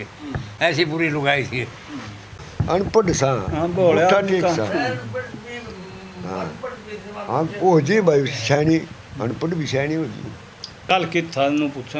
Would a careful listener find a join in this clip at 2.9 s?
yes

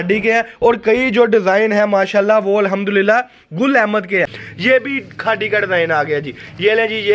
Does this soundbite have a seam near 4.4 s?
yes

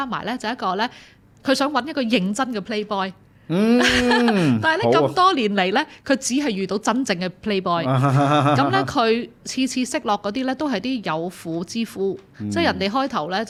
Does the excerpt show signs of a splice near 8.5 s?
no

